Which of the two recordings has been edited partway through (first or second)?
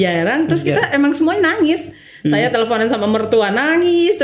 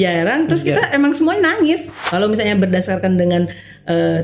second